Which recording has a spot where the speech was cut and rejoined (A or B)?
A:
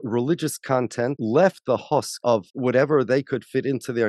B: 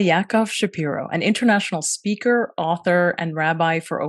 A